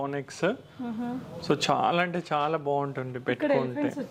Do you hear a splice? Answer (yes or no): no